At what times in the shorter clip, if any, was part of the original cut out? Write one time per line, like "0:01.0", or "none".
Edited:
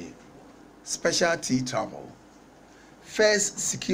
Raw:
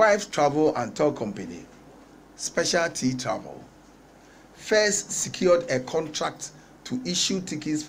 none